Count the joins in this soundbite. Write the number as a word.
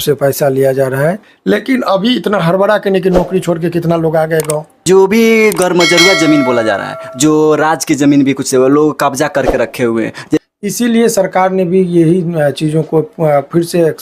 three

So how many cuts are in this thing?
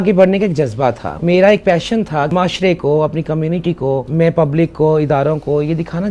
three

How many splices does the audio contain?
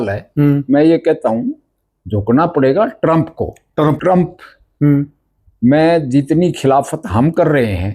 one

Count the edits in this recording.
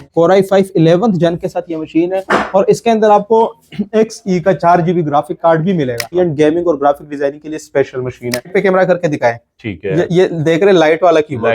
two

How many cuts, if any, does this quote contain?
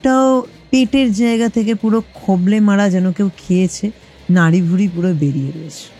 zero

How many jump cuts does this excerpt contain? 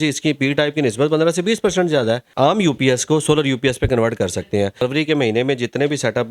two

